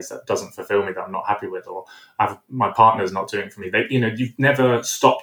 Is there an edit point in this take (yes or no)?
no